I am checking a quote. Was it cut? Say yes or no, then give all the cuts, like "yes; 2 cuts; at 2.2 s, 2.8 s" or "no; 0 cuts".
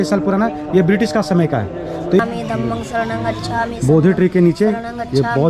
yes; 1 cut; at 2.2 s